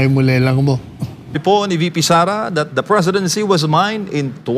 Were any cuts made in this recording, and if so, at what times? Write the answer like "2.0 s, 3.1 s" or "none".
none